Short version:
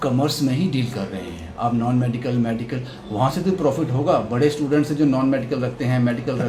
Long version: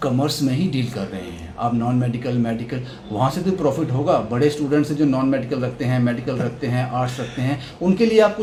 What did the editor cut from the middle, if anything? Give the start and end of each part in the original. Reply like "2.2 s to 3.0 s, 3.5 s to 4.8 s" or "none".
none